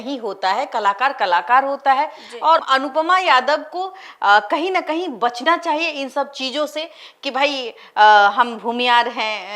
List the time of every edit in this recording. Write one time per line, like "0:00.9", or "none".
none